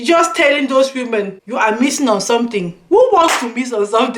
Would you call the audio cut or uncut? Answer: cut